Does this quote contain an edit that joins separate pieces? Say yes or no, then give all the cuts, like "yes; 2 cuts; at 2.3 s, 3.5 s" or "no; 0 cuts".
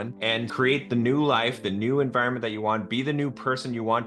no; 0 cuts